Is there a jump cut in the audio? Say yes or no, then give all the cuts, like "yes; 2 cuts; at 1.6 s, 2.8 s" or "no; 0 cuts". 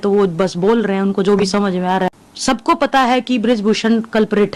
yes; 1 cut; at 2.3 s